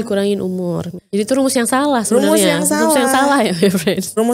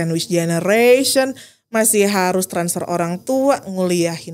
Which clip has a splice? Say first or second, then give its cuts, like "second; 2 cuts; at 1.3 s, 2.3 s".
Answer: first; 1 cut; at 0.9 s